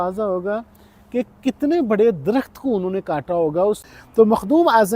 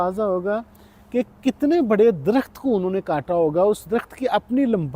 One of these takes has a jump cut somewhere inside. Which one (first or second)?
first